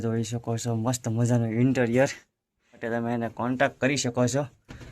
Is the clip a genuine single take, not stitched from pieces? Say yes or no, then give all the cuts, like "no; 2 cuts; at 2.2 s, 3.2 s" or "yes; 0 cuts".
no; 1 cut; at 2.8 s